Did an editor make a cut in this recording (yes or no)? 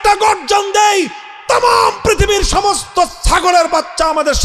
no